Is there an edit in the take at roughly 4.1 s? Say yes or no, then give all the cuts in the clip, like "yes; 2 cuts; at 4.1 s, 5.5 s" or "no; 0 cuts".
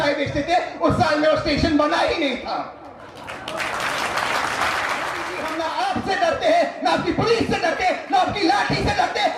no; 1 cut; at 5.4 s